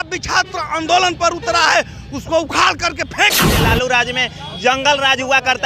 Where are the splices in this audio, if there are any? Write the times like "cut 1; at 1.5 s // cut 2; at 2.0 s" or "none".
cut 1; at 3.5 s